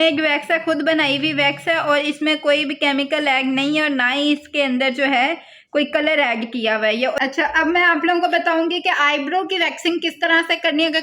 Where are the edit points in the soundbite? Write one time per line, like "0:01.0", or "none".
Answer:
0:07.1